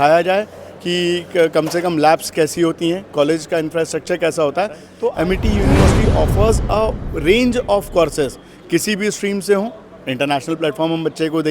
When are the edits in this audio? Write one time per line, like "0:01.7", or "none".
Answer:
0:04.9